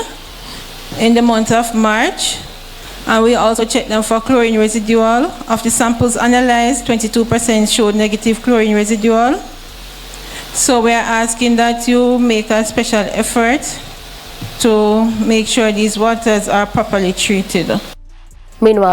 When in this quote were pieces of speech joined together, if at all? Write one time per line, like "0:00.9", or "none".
none